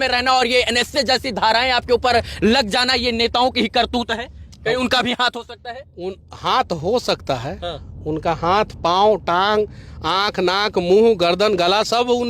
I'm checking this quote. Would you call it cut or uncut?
uncut